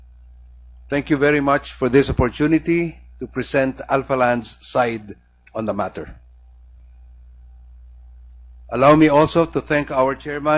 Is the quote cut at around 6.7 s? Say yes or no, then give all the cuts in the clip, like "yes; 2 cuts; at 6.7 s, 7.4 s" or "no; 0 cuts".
no; 1 cut; at 5.2 s